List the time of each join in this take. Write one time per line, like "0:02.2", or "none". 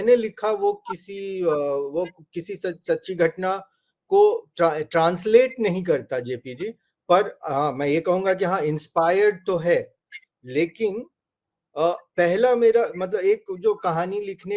none